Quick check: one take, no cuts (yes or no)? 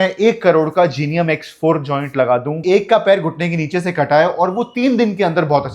no